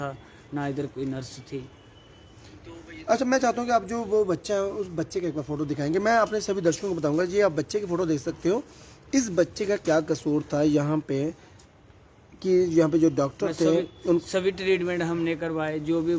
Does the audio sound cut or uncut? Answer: uncut